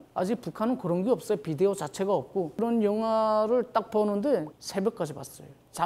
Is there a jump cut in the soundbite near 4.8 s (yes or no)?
no